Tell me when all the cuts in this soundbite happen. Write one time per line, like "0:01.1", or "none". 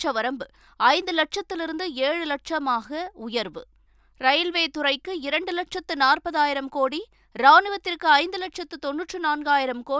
none